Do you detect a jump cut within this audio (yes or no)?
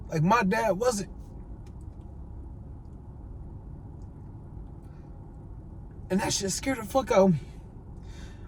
no